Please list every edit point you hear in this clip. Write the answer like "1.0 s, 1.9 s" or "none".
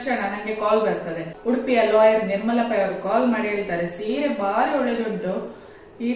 1.3 s